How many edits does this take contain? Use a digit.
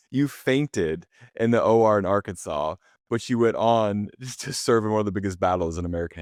0